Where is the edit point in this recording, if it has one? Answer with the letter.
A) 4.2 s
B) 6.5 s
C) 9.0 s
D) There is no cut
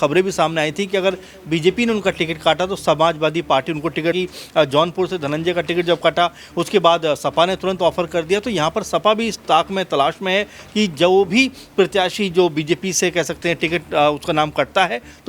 A